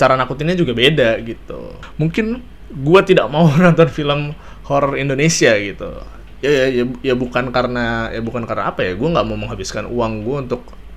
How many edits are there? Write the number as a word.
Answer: one